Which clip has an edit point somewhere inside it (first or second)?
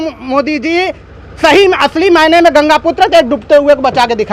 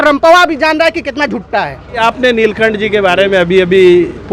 second